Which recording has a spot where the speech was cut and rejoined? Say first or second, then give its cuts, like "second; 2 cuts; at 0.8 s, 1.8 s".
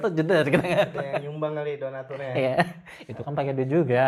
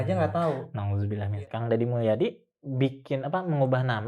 second; 1 cut; at 1.4 s